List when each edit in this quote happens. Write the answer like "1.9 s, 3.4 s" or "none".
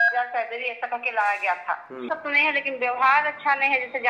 2.1 s